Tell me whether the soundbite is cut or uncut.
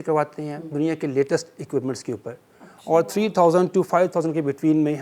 uncut